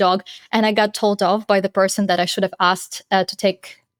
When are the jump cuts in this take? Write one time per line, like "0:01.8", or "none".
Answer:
none